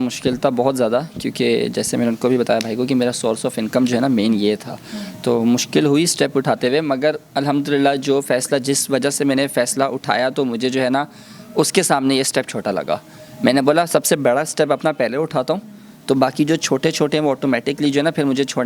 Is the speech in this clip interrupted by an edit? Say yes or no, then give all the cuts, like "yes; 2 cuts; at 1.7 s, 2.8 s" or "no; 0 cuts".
no; 0 cuts